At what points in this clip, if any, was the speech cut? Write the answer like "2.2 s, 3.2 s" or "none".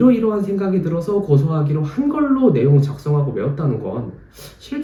none